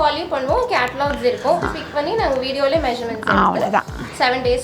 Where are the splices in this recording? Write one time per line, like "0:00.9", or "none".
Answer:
0:01.6